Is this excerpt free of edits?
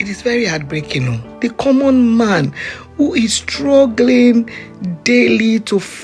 no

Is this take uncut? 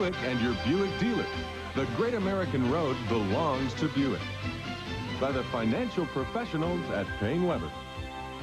no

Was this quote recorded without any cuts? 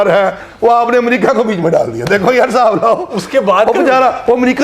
yes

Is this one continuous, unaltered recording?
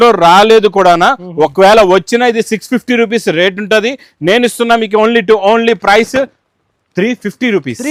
yes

